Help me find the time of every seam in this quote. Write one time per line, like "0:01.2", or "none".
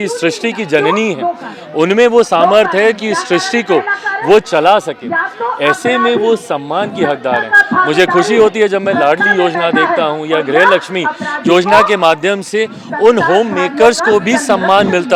none